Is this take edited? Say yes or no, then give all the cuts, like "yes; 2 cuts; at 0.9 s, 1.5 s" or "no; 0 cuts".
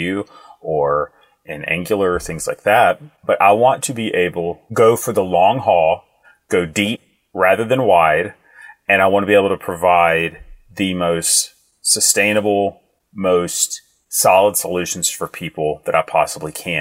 no; 0 cuts